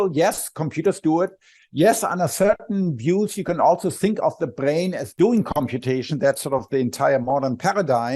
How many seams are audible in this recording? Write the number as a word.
one